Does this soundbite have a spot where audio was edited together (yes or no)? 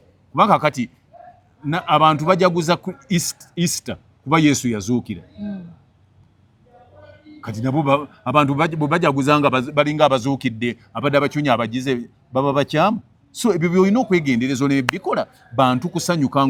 no